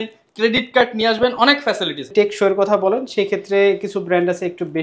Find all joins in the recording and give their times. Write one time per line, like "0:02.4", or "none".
0:02.1